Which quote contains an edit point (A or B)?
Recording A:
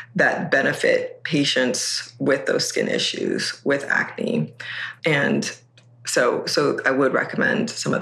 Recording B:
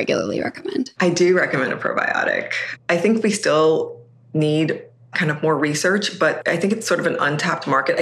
B